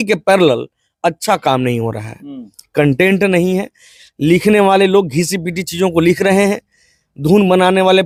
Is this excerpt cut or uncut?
uncut